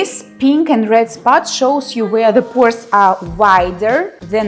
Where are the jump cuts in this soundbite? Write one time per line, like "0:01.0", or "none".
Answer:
none

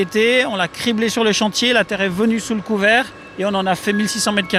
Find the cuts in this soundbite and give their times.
none

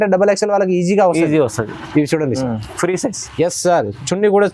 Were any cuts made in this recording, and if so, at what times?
none

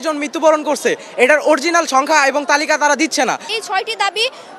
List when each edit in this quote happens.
0:03.4

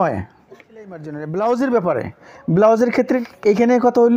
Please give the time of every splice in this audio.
0:01.0
0:03.2

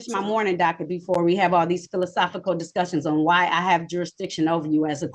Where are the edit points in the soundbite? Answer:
none

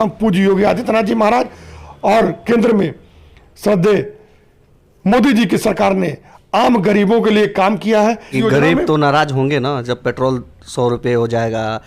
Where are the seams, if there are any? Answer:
0:08.3

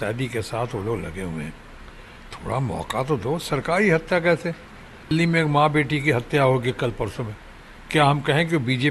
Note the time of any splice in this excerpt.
0:05.1

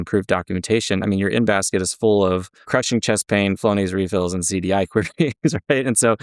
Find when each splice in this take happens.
0:02.6

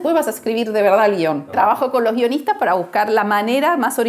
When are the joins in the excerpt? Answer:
0:01.5

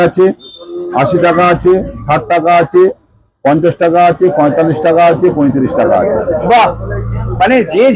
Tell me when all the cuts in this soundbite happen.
none

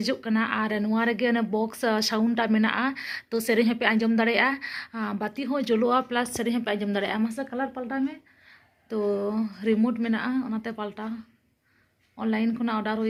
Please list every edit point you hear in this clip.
none

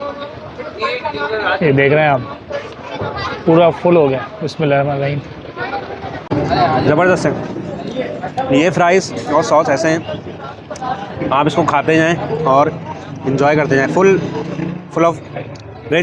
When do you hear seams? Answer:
0:06.3

